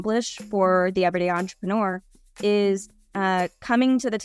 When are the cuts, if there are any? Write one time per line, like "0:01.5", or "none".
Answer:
none